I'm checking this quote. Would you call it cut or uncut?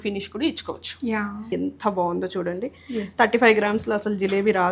cut